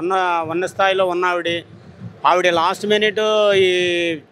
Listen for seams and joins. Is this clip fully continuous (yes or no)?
yes